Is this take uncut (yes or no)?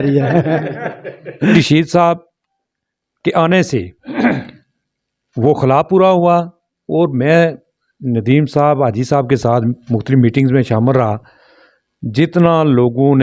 no